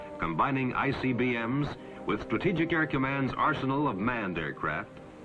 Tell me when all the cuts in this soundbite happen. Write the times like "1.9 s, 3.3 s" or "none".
none